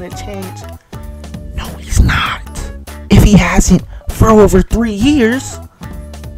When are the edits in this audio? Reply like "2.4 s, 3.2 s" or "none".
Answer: 5.5 s